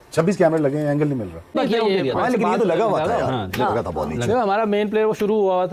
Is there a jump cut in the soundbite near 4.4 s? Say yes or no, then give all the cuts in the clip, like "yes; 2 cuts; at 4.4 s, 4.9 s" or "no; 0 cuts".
no; 1 cut; at 1.5 s